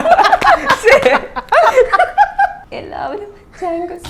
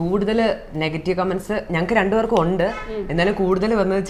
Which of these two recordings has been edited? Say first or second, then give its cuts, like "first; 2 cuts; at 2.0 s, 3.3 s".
first; 1 cut; at 2.6 s